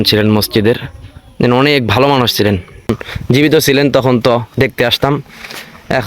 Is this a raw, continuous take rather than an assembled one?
no; 1 cut; at 3.1 s

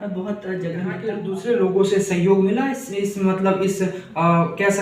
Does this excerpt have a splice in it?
yes; 1 cut; at 1.3 s

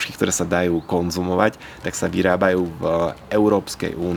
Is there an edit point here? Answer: no; 0 cuts

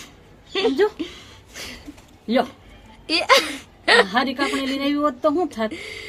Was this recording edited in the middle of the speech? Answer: no; 0 cuts

